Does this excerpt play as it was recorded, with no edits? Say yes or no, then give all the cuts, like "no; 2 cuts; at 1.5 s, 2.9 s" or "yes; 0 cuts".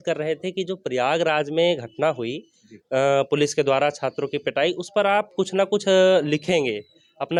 yes; 0 cuts